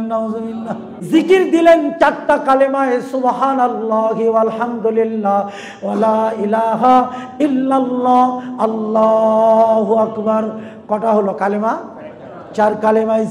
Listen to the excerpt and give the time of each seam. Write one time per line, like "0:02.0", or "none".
0:00.9